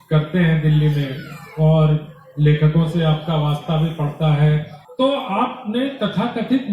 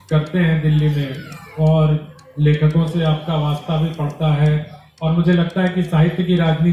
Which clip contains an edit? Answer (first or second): first